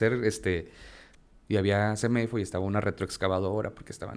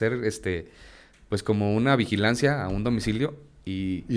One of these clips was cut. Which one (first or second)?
first